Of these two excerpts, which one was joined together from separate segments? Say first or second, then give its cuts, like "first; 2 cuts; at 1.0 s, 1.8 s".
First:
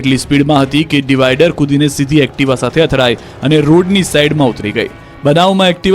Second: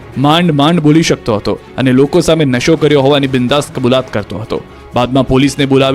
first; 1 cut; at 2.6 s